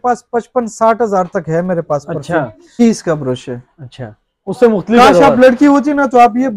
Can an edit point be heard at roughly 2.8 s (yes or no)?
yes